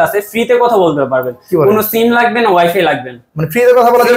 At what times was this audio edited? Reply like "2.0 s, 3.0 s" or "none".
none